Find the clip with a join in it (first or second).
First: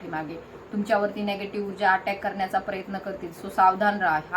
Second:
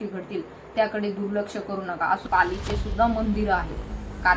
second